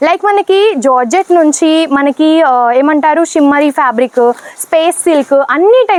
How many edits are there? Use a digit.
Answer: 0